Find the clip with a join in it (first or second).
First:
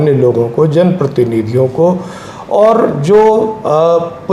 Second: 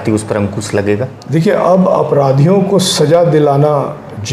second